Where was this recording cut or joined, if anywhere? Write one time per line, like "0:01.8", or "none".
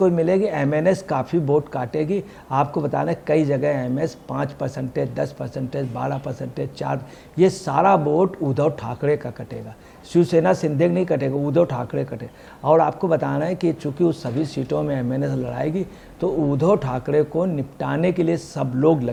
none